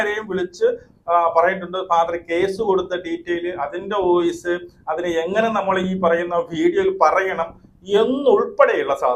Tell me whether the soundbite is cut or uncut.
uncut